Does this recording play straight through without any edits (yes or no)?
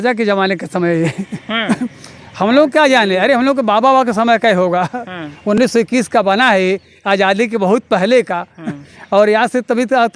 yes